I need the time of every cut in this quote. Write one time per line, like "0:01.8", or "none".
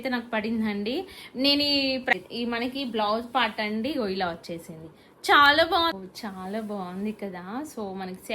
0:02.1
0:06.0